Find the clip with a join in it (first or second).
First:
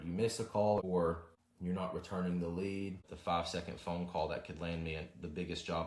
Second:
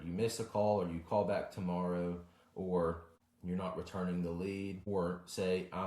first